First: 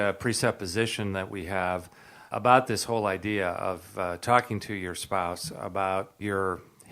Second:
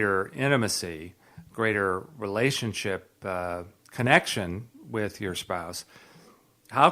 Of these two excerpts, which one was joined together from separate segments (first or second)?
first